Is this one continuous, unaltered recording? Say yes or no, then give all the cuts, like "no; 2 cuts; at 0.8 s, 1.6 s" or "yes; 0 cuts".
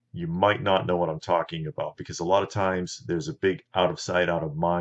no; 1 cut; at 3.4 s